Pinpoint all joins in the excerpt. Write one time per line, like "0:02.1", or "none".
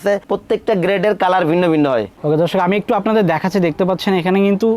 0:02.1